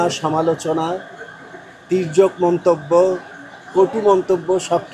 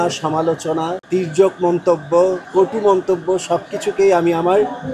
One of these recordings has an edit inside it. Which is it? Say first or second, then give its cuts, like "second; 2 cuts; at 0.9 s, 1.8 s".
second; 2 cuts; at 1.0 s, 2.4 s